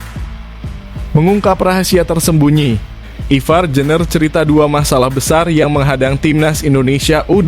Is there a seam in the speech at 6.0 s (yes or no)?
no